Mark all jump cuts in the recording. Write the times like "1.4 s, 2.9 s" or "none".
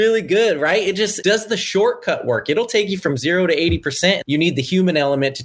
1.2 s, 4.2 s

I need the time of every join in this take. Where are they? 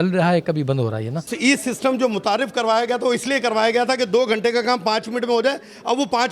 none

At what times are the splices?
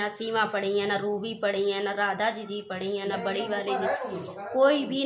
none

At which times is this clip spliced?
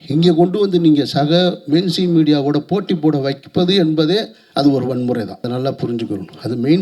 5.5 s

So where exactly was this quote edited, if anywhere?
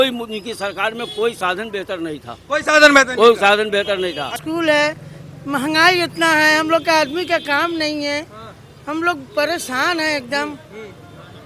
4.4 s

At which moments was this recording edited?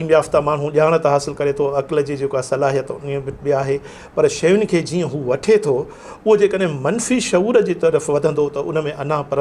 none

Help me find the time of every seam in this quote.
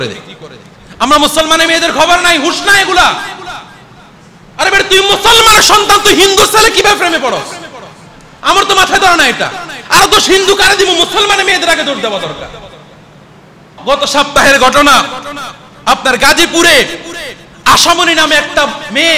13.7 s

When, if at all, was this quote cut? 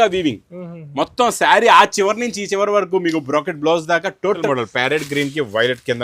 4.4 s

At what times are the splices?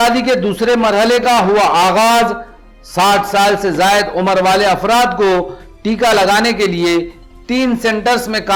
none

